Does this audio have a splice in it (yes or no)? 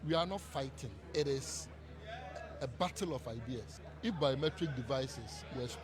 yes